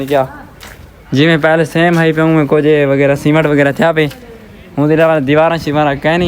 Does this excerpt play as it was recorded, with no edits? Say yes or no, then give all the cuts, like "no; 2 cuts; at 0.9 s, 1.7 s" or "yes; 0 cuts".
yes; 0 cuts